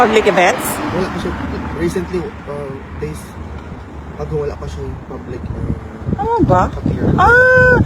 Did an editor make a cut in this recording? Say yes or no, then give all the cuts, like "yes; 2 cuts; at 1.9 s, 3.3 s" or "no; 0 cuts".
no; 0 cuts